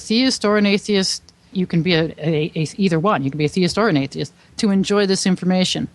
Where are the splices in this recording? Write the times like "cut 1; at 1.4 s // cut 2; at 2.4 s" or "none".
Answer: cut 1; at 1.5 s